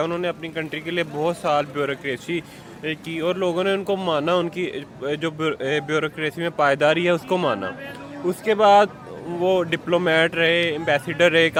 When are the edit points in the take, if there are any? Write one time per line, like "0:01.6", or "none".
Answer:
none